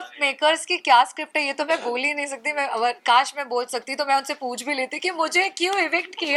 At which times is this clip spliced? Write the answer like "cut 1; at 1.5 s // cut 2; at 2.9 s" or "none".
none